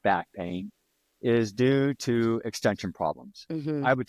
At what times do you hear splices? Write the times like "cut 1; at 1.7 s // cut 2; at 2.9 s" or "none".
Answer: none

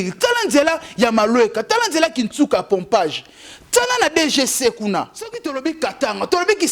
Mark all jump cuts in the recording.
cut 1; at 5.4 s

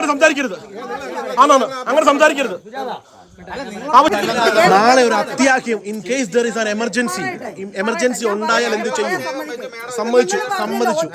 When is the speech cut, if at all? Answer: cut 1; at 4.1 s

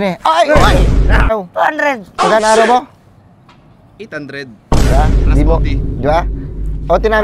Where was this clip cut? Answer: cut 1; at 1.3 s

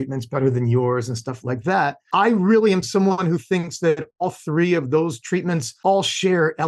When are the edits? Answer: cut 1; at 2.0 s // cut 2; at 5.7 s

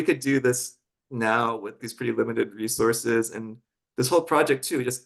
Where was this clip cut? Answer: cut 1; at 1.8 s

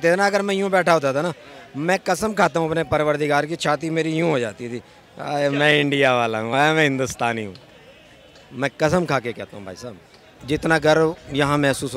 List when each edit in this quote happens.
cut 1; at 10.4 s

